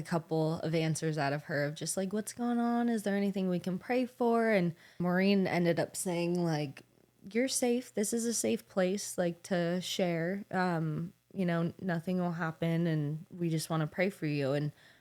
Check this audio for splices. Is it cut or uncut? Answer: cut